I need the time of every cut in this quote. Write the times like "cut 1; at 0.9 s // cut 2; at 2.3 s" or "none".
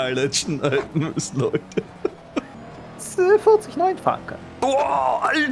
cut 1; at 2.6 s